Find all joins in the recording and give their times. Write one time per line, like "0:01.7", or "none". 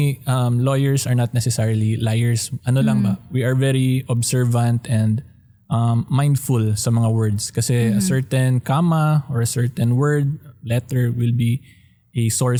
none